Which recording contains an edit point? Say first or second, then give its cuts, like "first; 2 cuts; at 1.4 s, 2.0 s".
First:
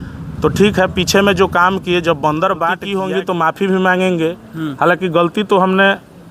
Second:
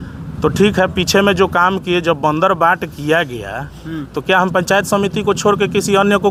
first; 1 cut; at 2.9 s